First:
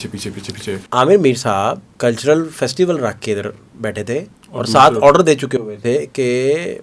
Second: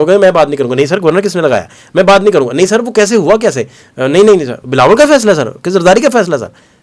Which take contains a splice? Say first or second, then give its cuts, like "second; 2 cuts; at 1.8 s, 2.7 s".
first; 3 cuts; at 0.8 s, 1.9 s, 4.4 s